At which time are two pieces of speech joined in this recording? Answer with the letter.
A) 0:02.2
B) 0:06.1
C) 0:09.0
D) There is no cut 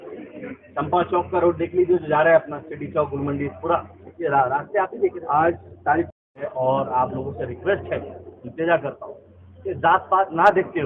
B